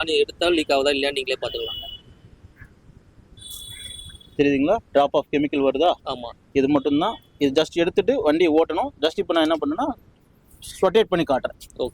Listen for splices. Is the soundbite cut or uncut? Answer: uncut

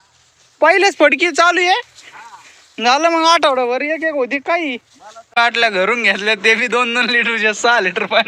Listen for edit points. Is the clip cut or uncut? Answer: cut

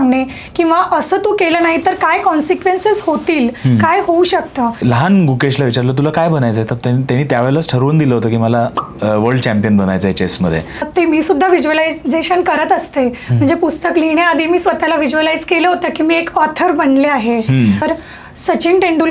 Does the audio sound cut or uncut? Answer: cut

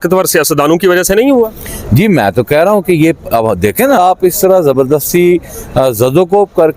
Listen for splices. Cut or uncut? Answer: cut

